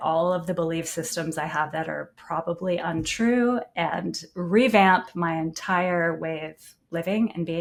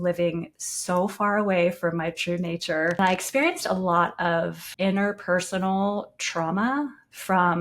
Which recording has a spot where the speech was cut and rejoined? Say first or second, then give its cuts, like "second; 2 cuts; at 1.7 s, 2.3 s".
second; 2 cuts; at 3.0 s, 4.6 s